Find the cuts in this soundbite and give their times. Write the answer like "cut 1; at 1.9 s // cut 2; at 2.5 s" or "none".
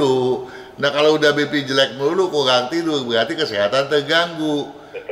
none